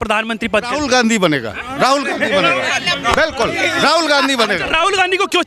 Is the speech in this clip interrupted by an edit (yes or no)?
no